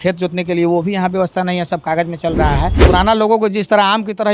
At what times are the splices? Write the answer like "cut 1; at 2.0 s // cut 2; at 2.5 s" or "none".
cut 1; at 2.8 s